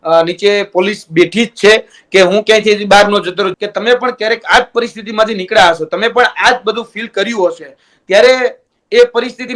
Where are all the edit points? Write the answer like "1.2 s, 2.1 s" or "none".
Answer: 3.5 s